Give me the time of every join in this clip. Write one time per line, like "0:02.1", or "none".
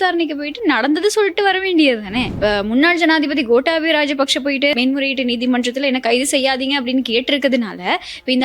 0:02.3